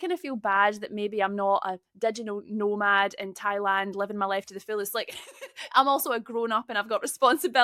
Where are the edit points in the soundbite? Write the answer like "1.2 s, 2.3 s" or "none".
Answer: none